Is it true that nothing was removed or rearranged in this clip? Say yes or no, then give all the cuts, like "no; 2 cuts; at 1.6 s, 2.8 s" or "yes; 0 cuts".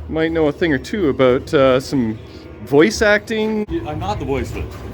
no; 1 cut; at 3.6 s